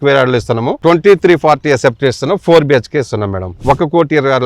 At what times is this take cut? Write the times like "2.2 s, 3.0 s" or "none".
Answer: 3.5 s